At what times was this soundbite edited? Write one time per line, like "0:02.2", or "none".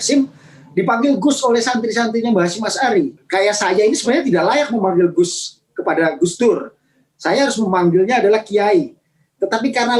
0:03.2